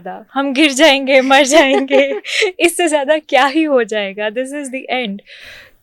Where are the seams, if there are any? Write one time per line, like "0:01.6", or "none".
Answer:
none